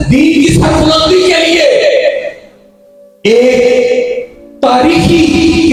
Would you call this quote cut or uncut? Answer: uncut